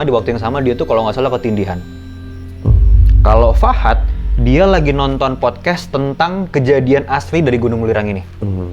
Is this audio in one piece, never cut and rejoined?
yes; 0 cuts

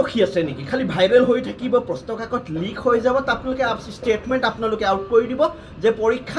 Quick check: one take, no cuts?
yes; 0 cuts

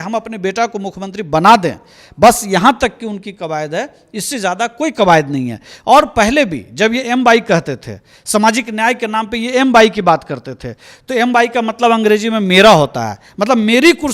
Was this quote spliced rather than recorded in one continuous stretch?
no; 0 cuts

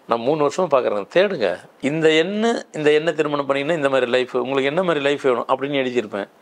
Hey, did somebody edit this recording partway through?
yes; 1 cut; at 1.7 s

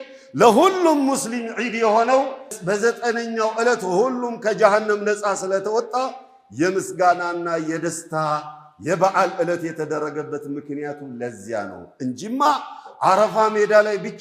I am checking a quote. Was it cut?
yes; 1 cut; at 2.6 s

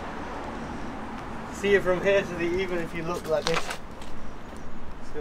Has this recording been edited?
no; 0 cuts

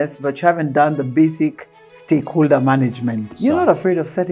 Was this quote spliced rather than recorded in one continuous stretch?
yes; 1 cut; at 3.3 s

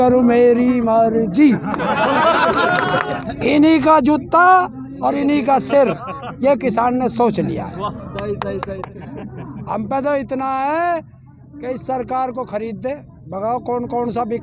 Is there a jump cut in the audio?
yes; 2 cuts; at 3.2 s, 8.9 s

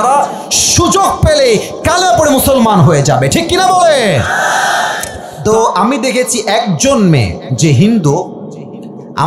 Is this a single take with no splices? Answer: no; 1 cut; at 5.2 s

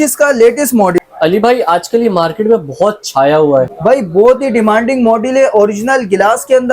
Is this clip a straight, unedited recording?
no; 2 cuts; at 1.0 s, 3.7 s

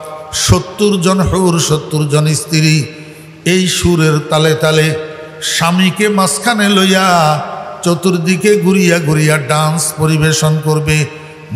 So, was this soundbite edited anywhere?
no; 0 cuts

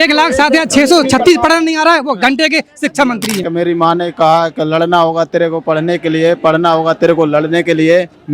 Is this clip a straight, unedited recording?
no; 1 cut; at 3.4 s

